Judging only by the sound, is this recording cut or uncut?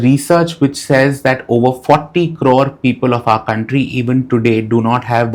uncut